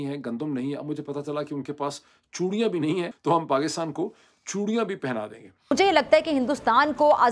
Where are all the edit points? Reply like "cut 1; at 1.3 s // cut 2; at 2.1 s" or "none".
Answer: cut 1; at 3.1 s // cut 2; at 5.7 s